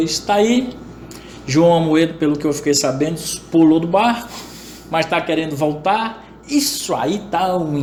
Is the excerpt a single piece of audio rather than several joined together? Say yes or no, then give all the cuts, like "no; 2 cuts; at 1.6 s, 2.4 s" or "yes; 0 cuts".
yes; 0 cuts